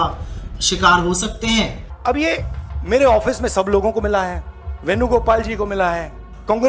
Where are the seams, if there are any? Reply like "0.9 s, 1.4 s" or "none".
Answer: 1.8 s